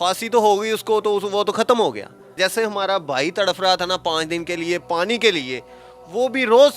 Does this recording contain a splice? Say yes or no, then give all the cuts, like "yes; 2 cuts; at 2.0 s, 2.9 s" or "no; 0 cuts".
yes; 1 cut; at 2.4 s